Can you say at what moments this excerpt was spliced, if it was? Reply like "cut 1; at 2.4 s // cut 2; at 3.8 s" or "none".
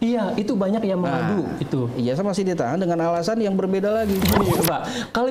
cut 1; at 4.2 s